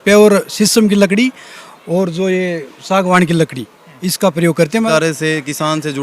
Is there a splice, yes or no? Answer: yes